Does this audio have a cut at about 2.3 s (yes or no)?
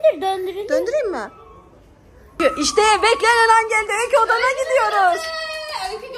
yes